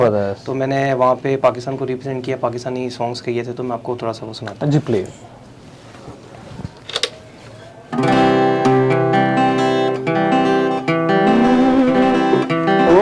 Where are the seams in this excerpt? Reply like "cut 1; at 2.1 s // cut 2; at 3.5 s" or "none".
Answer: none